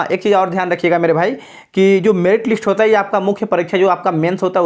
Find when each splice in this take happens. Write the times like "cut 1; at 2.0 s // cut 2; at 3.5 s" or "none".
none